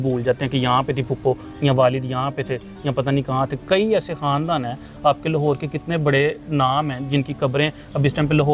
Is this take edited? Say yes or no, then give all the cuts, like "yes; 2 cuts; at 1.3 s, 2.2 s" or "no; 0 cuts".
no; 0 cuts